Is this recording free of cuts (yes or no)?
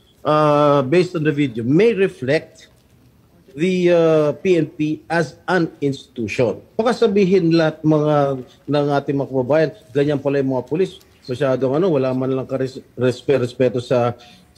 yes